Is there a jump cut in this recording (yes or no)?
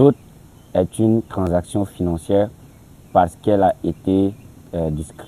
no